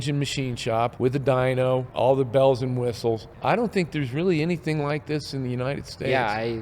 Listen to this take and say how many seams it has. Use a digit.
3